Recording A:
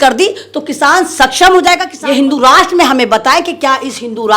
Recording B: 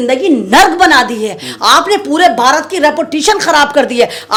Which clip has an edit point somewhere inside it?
A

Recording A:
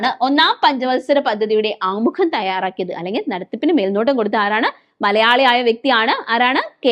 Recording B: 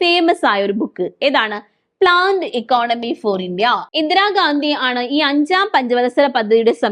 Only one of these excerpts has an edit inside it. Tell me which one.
B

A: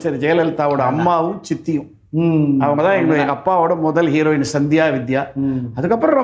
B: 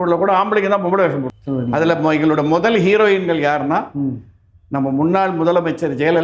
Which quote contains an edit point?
B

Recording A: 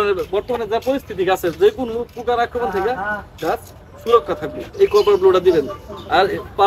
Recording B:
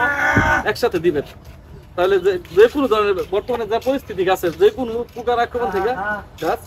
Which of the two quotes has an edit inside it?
A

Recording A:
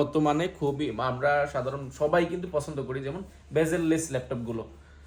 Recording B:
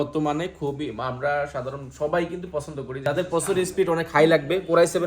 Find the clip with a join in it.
B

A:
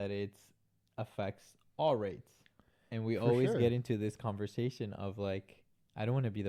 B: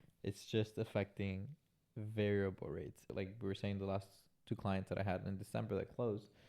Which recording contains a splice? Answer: B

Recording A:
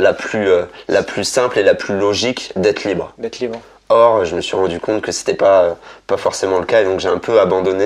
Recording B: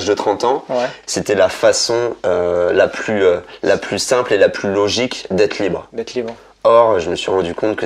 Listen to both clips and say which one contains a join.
B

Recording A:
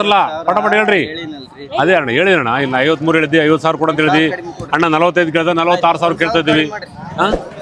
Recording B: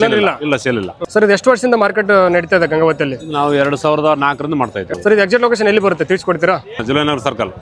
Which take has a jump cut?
B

